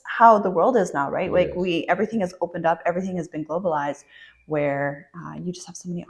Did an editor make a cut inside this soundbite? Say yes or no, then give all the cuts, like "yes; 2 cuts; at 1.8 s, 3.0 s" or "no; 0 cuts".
no; 0 cuts